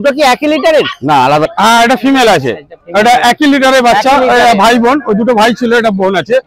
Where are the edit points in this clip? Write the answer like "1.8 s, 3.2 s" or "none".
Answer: 1.4 s